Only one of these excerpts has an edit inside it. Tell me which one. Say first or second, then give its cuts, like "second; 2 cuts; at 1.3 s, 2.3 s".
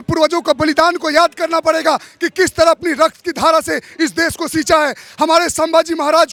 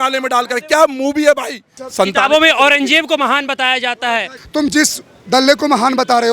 second; 2 cuts; at 1.8 s, 4.4 s